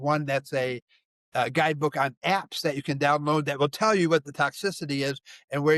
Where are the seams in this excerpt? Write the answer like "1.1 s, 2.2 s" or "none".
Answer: none